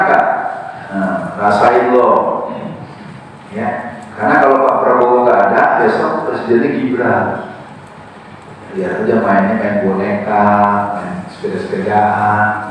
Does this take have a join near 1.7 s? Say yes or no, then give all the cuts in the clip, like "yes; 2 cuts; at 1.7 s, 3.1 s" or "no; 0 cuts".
no; 0 cuts